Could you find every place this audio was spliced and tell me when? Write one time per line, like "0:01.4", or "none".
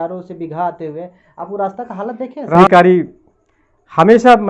0:02.6